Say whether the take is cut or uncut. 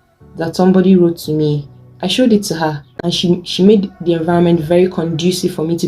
cut